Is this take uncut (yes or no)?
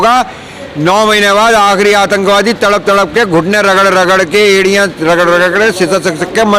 yes